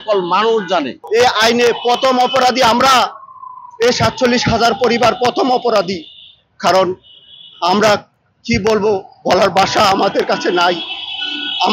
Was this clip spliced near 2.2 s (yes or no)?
no